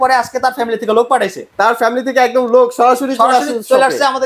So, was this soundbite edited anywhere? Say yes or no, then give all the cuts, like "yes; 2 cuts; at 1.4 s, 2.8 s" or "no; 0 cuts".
no; 0 cuts